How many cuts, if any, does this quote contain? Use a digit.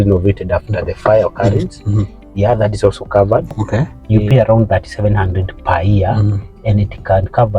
1